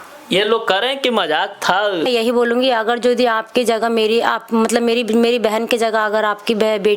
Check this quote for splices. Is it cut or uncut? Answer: cut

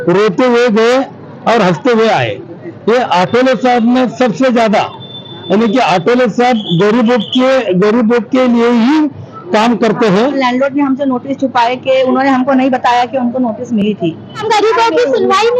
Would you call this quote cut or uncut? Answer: cut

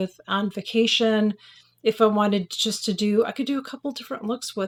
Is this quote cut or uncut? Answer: uncut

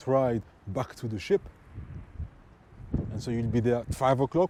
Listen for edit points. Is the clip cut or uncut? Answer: uncut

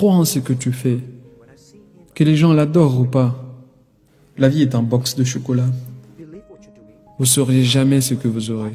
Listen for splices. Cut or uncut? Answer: uncut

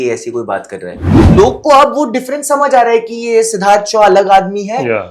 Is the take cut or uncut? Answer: cut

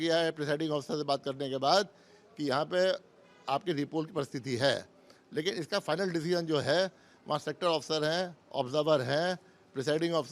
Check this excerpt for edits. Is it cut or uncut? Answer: uncut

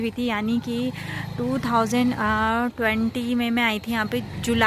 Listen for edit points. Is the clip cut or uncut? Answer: uncut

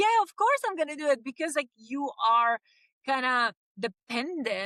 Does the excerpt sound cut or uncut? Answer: uncut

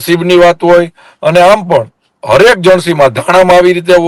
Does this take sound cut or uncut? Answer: uncut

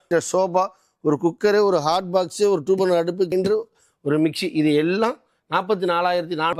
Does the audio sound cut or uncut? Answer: uncut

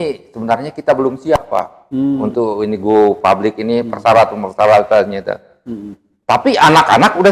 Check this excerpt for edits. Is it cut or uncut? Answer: uncut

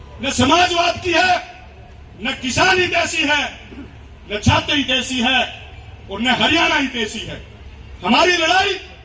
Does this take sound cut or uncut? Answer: uncut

